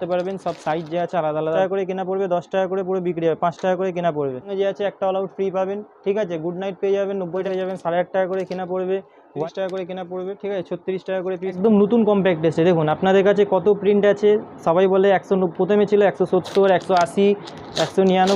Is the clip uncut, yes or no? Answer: no